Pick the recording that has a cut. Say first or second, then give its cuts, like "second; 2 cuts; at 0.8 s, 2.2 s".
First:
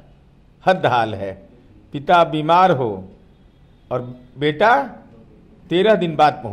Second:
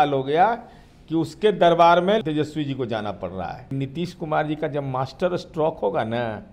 second; 2 cuts; at 2.2 s, 3.7 s